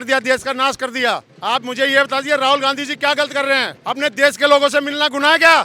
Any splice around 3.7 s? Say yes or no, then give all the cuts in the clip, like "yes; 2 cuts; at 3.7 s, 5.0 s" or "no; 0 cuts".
yes; 2 cuts; at 1.3 s, 3.7 s